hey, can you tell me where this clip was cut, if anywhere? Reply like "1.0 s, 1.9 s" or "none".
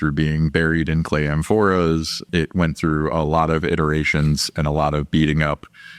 2.2 s